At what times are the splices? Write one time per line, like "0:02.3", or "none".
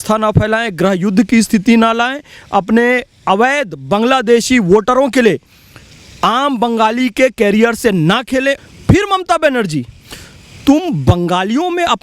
0:08.6